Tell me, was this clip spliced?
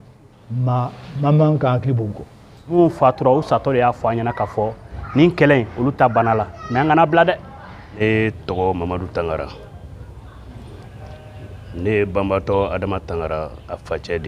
yes; 2 cuts; at 2.6 s, 7.9 s

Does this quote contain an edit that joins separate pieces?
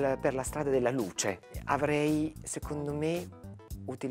yes; 1 cut; at 1.5 s

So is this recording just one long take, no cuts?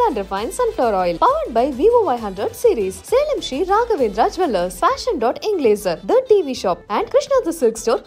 yes; 0 cuts

